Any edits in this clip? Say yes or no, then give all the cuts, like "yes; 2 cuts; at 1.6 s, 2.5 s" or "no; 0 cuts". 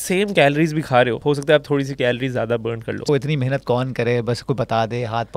yes; 2 cuts; at 1.2 s, 3.1 s